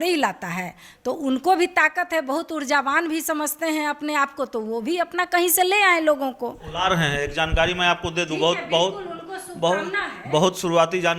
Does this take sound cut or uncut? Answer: uncut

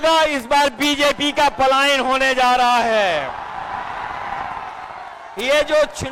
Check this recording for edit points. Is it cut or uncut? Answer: uncut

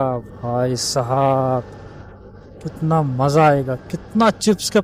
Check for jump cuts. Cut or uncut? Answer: uncut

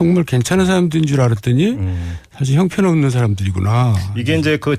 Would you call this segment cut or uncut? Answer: uncut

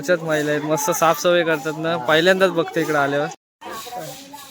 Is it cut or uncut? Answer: cut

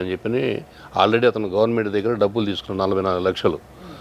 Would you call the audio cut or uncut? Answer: uncut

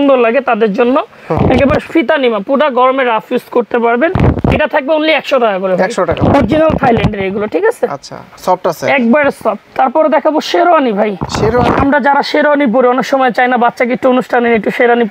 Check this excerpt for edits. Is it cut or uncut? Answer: uncut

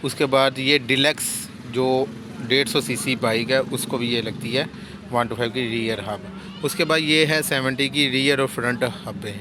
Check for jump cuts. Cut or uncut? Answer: uncut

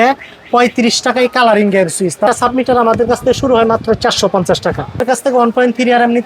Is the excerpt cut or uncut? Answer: cut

